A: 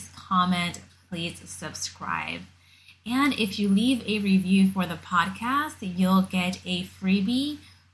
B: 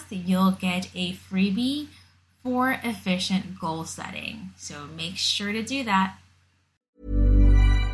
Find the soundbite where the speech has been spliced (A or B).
B